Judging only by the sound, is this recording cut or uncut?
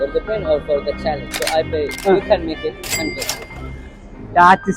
cut